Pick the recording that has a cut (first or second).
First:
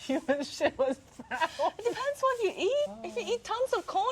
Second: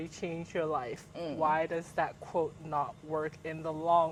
first